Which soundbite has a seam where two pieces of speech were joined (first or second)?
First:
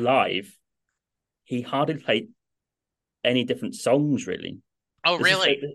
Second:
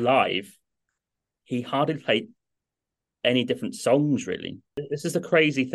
second